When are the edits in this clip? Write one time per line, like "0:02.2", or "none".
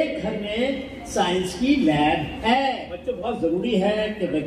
0:02.8